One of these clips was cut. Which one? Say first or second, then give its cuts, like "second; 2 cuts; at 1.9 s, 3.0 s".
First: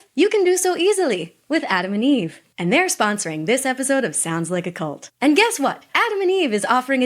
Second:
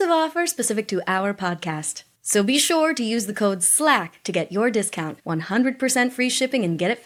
first; 2 cuts; at 2.4 s, 5.9 s